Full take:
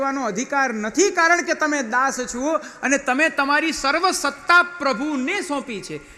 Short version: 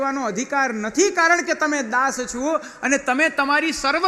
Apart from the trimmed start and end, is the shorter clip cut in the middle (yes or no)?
no